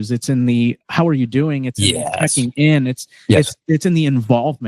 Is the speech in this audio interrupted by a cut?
no; 0 cuts

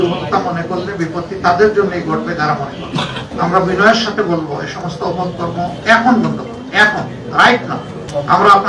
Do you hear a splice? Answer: no; 0 cuts

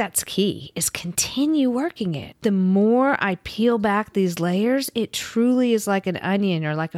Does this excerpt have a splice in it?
yes; 1 cut; at 2.2 s

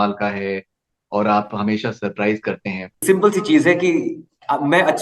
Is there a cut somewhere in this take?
yes; 1 cut; at 3.0 s

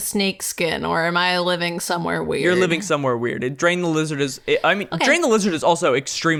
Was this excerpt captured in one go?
yes; 0 cuts

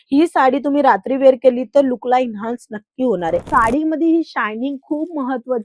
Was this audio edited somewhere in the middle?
yes; 1 cut; at 3.5 s

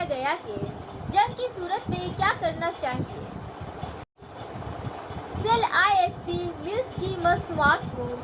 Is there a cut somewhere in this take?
yes; 1 cut; at 4.1 s

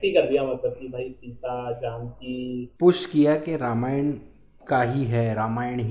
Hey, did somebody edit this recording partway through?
yes; 1 cut; at 2.7 s

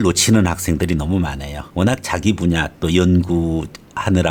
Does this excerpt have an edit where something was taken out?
no; 0 cuts

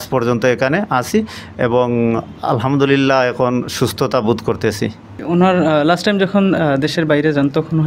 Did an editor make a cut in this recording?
yes; 1 cut; at 5.1 s

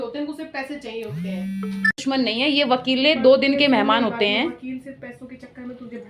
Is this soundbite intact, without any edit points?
no; 1 cut; at 2.4 s

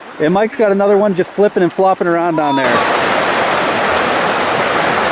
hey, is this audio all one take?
no; 1 cut; at 2.8 s

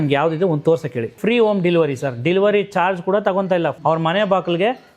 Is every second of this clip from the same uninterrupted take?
no; 2 cuts; at 1.1 s, 3.8 s

